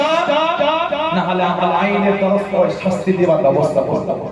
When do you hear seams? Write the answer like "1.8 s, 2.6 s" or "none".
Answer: none